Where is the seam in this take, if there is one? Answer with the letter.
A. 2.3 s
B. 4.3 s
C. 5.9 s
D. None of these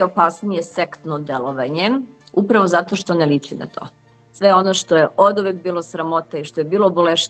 B